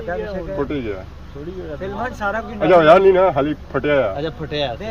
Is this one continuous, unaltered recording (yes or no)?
yes